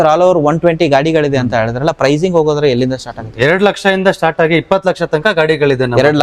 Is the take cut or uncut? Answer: uncut